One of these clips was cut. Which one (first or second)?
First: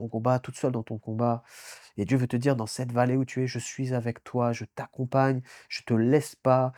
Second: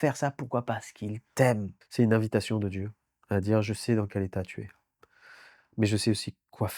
second